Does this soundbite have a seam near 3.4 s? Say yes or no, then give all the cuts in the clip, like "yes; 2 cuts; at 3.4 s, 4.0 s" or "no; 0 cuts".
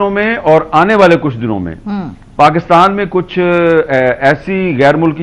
no; 0 cuts